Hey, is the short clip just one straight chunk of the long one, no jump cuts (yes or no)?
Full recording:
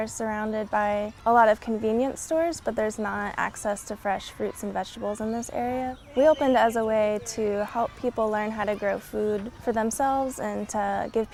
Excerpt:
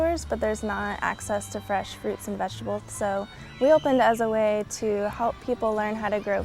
no